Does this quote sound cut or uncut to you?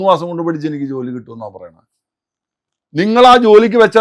uncut